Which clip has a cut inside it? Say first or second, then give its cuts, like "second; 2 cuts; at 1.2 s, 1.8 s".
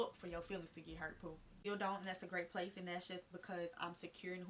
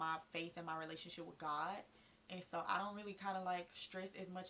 first; 1 cut; at 1.6 s